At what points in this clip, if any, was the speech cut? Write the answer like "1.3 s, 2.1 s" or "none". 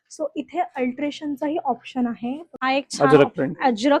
2.5 s